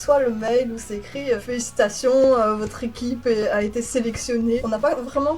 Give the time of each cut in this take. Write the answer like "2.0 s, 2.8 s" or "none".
1.4 s, 4.6 s